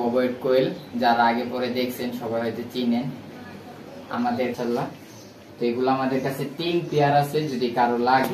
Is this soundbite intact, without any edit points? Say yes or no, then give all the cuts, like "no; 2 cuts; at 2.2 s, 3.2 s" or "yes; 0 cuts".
no; 1 cut; at 4.5 s